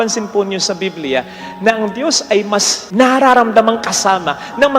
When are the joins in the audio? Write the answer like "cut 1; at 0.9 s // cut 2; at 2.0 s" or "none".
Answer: cut 1; at 2.8 s